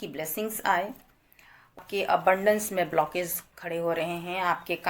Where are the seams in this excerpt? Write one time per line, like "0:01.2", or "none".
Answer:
0:01.8